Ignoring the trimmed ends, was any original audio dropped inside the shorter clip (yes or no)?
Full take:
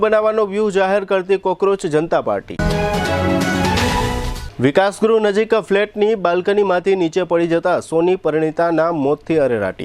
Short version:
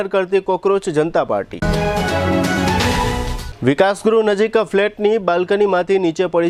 no